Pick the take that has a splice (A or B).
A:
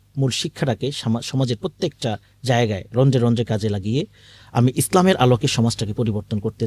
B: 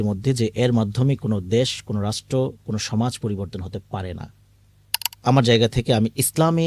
B